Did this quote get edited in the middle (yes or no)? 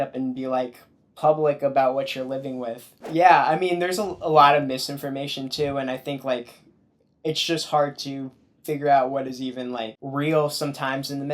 yes